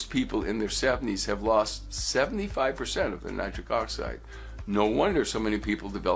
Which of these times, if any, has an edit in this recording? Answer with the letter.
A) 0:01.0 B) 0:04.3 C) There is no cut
C